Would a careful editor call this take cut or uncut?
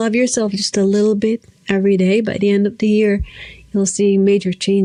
uncut